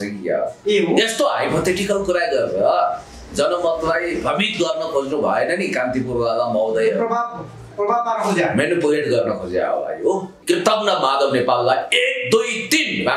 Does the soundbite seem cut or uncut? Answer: cut